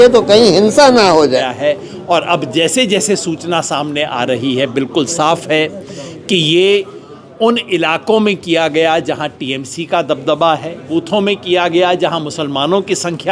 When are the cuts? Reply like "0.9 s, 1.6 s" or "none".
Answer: 1.5 s, 10.8 s